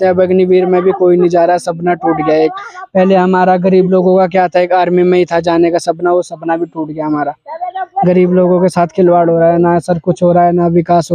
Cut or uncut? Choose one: uncut